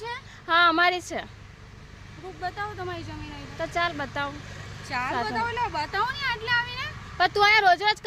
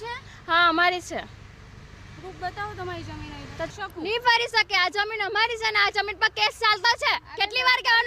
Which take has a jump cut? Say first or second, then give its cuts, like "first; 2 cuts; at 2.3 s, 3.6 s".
second; 1 cut; at 3.7 s